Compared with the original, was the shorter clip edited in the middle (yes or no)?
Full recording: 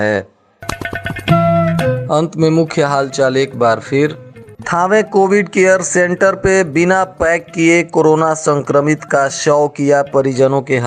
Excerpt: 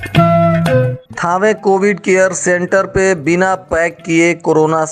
yes